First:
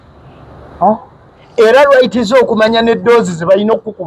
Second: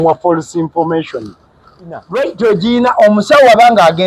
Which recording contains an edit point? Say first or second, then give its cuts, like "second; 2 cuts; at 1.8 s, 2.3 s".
second; 1 cut; at 2.1 s